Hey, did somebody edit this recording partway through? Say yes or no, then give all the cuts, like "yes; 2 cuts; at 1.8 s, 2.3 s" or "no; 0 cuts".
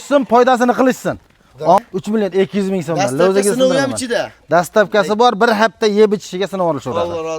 yes; 1 cut; at 1.8 s